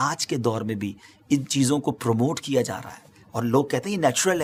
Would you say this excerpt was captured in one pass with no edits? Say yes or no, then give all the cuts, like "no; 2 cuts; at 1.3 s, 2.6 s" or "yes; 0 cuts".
yes; 0 cuts